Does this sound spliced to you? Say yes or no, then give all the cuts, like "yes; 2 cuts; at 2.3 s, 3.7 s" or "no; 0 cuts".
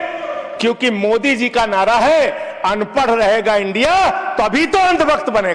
no; 0 cuts